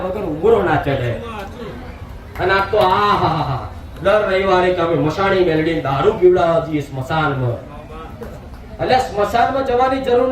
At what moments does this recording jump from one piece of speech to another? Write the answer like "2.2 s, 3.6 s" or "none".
none